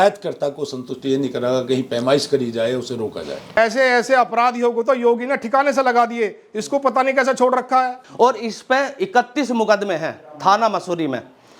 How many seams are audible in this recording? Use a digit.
2